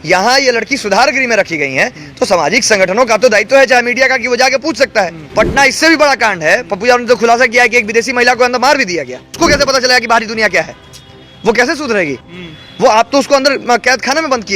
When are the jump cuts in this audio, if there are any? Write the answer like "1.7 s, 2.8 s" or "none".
5.2 s, 9.3 s